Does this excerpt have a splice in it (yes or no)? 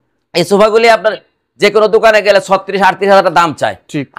no